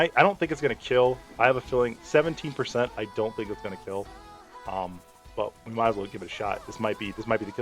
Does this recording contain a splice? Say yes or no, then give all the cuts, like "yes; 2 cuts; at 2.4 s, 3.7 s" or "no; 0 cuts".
no; 0 cuts